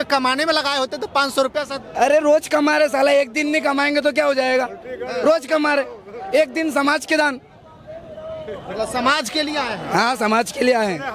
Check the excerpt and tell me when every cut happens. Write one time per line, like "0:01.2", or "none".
none

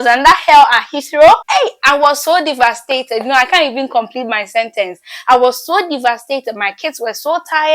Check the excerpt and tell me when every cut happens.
0:01.4

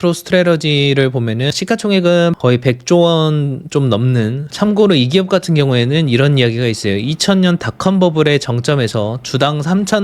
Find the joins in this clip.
0:01.5
0:02.4
0:04.5

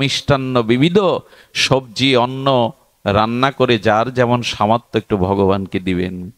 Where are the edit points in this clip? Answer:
none

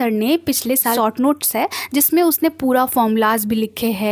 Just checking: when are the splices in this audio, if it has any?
0:00.9

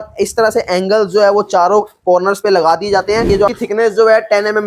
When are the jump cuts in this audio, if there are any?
0:03.3

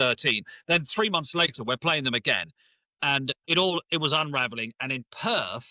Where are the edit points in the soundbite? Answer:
none

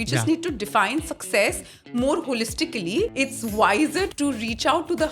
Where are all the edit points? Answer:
0:03.1
0:04.1

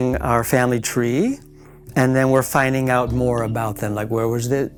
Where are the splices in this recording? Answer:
none

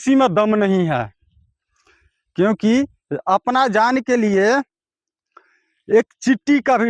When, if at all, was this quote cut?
none

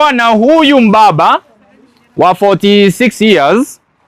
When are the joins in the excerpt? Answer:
none

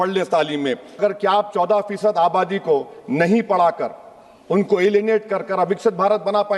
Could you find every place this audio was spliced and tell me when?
0:01.0

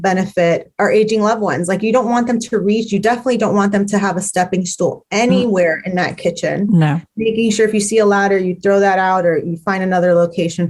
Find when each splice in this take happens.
none

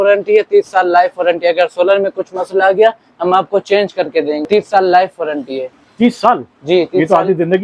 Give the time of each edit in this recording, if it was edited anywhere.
0:04.5

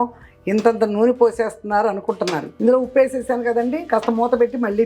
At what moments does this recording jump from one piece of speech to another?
0:02.6

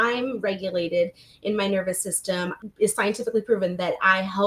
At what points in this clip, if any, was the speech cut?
0:02.6

